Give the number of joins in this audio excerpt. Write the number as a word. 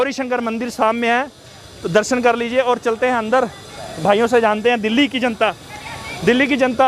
zero